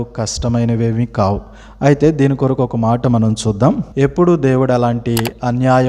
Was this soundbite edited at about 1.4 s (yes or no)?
no